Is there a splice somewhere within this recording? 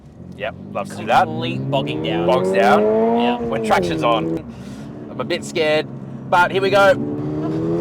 yes; 1 cut; at 4.4 s

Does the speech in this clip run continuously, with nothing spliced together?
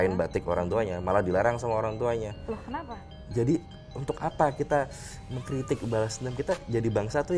no; 1 cut; at 3.0 s

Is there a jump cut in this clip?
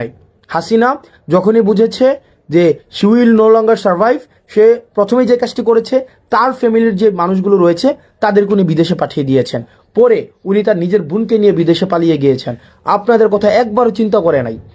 no; 0 cuts

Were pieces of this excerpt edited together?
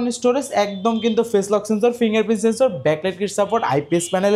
no; 0 cuts

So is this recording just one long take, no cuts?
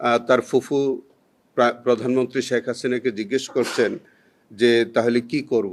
yes; 0 cuts

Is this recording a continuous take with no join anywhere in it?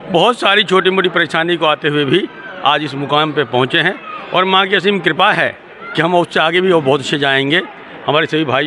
yes; 0 cuts

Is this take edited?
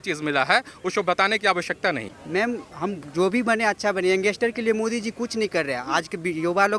yes; 1 cut; at 2.1 s

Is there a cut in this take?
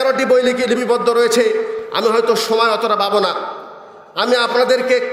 no; 0 cuts

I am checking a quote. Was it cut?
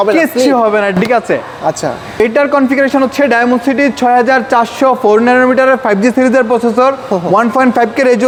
no; 0 cuts

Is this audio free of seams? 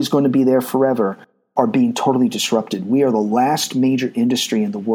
yes; 0 cuts

